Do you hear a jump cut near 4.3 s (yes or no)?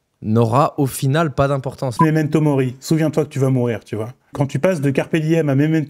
yes